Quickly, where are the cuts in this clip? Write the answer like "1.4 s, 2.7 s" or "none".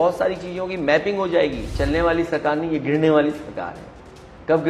1.7 s